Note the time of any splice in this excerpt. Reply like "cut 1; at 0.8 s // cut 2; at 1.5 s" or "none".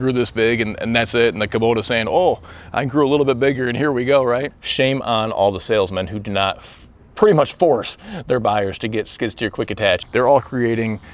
cut 1; at 4.6 s // cut 2; at 10.0 s